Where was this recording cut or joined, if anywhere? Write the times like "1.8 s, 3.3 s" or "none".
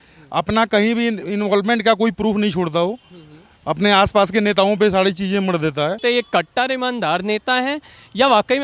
6.0 s